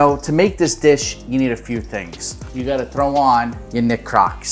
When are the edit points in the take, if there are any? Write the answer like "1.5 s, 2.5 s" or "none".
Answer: 2.4 s, 3.6 s

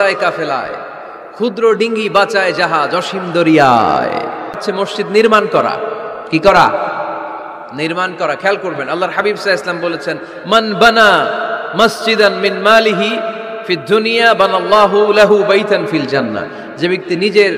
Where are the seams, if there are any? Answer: 4.5 s

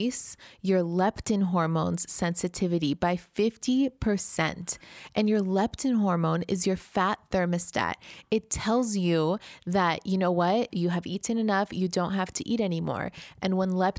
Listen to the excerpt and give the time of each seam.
none

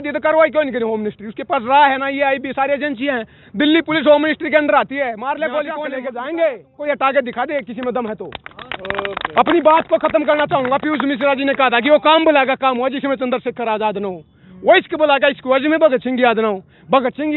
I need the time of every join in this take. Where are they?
6.0 s

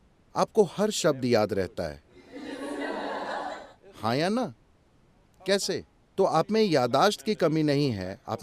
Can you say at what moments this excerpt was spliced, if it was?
none

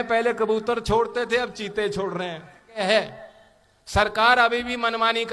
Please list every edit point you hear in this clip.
2.8 s

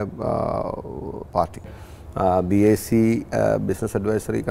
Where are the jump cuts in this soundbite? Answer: 1.8 s

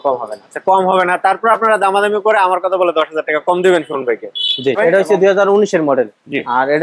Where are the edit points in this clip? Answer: 4.8 s

